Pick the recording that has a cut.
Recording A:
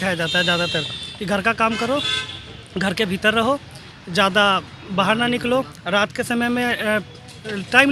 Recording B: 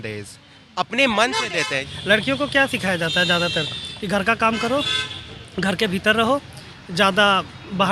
B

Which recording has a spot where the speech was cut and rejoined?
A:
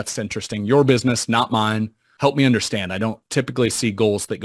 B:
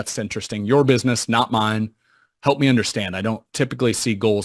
A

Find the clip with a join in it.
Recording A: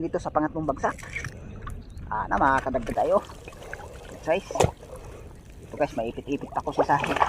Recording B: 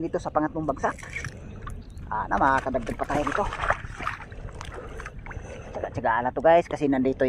A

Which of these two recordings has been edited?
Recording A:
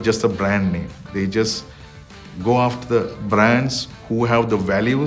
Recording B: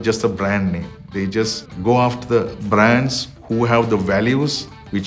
B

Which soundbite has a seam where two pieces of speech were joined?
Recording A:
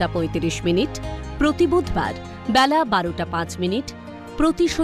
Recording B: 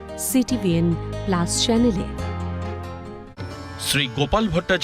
B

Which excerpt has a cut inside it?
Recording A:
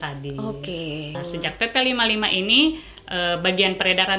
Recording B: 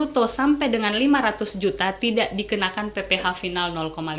A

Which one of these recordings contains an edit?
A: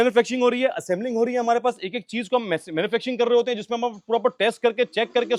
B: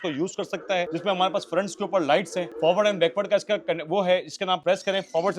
B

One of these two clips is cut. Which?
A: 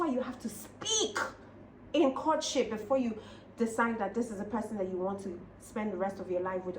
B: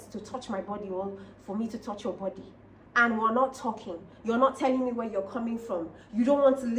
A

